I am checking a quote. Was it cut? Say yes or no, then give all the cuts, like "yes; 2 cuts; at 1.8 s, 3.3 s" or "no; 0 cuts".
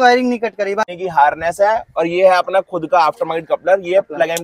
yes; 1 cut; at 0.9 s